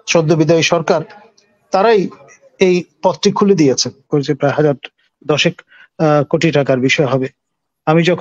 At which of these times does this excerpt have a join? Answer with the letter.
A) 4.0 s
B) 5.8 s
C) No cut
A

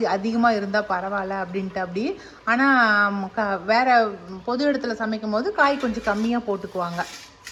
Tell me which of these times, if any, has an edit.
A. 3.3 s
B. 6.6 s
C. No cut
C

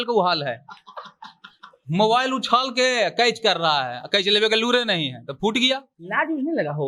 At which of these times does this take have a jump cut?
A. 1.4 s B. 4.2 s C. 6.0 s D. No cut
C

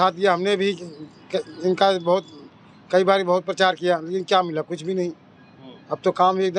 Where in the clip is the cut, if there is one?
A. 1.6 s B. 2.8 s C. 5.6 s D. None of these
D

